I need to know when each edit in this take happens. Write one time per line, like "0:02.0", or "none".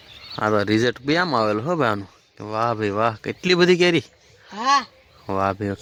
none